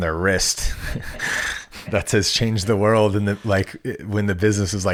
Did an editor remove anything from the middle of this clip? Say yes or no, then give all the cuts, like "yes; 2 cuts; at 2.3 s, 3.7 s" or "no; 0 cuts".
no; 0 cuts